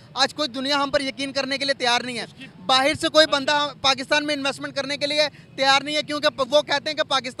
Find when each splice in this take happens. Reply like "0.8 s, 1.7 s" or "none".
none